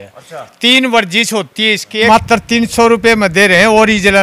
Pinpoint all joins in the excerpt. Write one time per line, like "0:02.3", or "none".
0:02.1